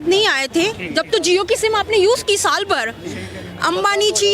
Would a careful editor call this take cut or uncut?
uncut